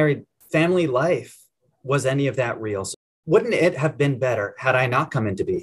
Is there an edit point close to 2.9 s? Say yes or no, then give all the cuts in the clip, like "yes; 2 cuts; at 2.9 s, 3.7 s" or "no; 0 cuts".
yes; 1 cut; at 2.9 s